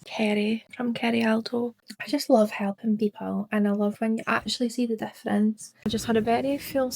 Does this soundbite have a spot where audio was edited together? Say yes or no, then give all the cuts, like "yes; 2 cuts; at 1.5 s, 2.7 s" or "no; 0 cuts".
yes; 2 cuts; at 1.8 s, 5.8 s